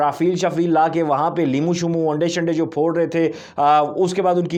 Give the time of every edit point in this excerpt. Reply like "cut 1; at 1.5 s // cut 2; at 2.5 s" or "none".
none

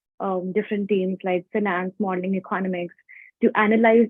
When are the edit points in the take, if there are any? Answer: none

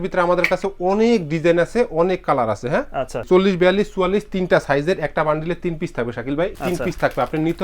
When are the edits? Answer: cut 1; at 3.2 s // cut 2; at 6.5 s

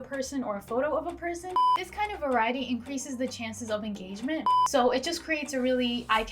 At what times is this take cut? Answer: cut 1; at 1.7 s // cut 2; at 4.5 s

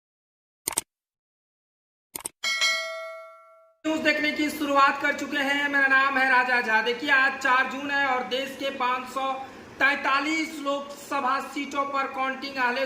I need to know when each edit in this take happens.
cut 1; at 3.4 s

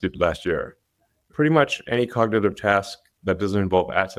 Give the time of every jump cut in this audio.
cut 1; at 1.2 s

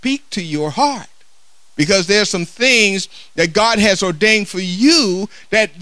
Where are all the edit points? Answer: none

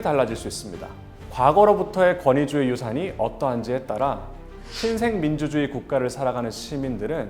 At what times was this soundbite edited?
cut 1; at 1.3 s

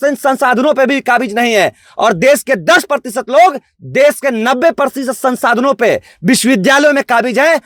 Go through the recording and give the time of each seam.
none

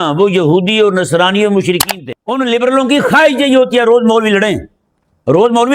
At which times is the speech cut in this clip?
cut 1; at 1.8 s

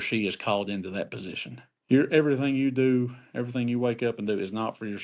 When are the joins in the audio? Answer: cut 1; at 1.7 s

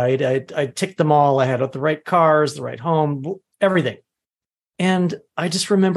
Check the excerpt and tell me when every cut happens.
none

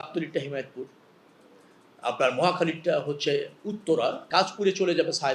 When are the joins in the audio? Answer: cut 1; at 4.2 s

